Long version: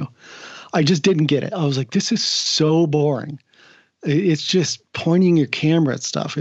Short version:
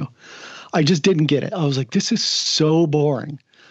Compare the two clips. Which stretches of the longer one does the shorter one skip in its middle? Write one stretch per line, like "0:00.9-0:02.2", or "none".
none

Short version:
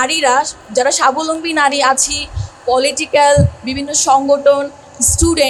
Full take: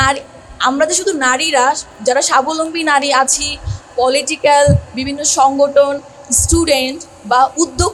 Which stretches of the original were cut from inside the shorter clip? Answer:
none

